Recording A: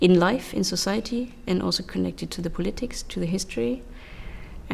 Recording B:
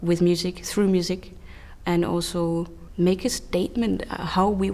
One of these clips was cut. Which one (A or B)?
B